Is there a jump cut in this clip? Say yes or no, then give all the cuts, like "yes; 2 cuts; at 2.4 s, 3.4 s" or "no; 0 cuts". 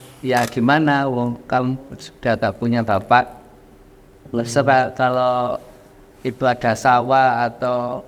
no; 0 cuts